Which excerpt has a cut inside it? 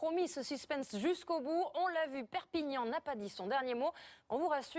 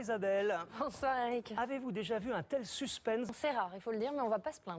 first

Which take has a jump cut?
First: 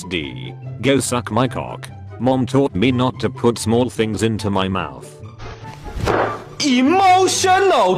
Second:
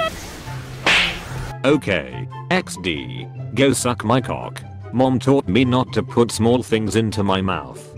second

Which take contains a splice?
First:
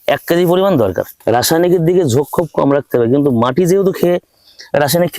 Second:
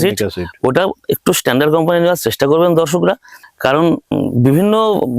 first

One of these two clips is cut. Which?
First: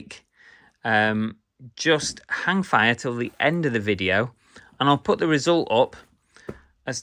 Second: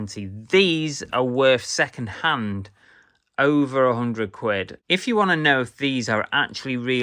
second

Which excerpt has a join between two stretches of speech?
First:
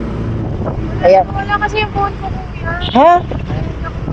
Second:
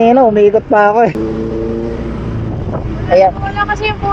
second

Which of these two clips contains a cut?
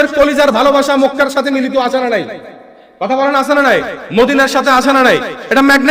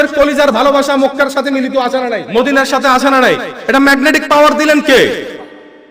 second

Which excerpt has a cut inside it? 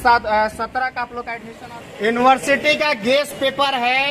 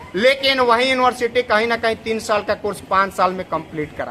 first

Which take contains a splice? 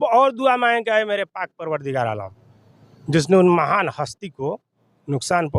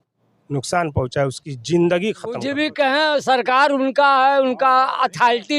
second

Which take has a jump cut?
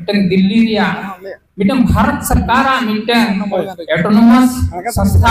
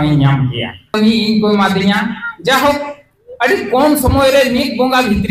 second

